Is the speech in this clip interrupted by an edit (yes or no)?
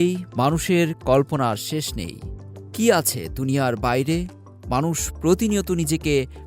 no